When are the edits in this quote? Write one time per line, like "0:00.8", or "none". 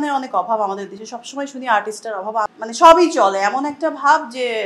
0:02.5